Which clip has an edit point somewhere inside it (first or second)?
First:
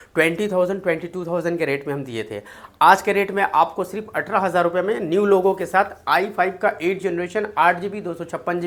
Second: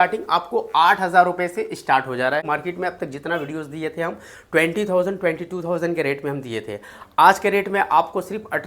second